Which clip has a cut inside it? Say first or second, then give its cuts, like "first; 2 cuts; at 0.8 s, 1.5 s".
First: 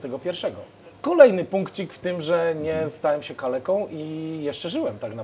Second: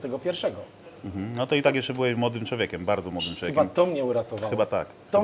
first; 1 cut; at 0.9 s